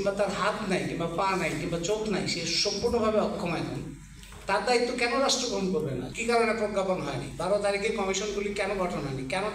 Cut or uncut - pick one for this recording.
cut